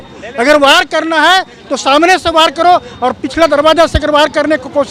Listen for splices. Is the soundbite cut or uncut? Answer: uncut